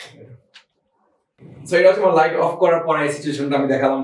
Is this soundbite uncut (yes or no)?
yes